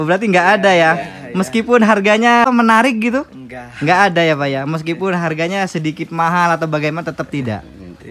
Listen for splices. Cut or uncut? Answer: cut